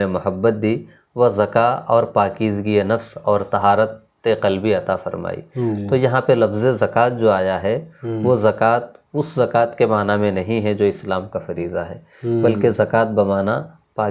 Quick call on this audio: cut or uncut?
uncut